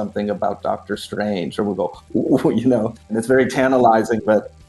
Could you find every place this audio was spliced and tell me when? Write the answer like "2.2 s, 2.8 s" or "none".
3.0 s

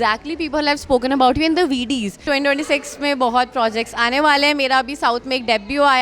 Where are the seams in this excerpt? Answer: 2.2 s

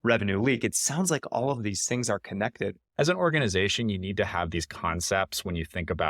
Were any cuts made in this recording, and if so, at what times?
2.9 s

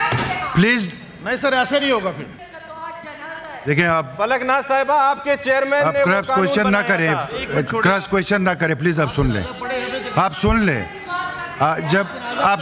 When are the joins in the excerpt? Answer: 2.3 s

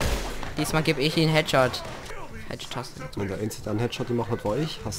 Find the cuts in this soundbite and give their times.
2.0 s

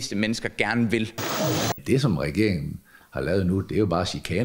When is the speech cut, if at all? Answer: 1.7 s

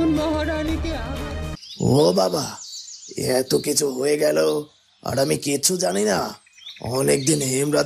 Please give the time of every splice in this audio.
1.2 s

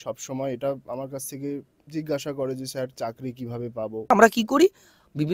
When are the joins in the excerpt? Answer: 4.1 s

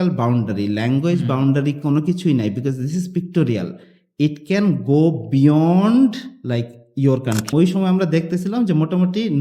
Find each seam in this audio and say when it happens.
7.5 s

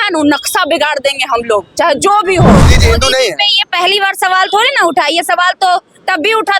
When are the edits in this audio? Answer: 2.8 s

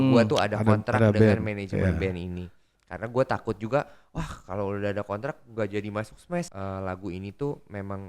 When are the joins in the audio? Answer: 6.5 s

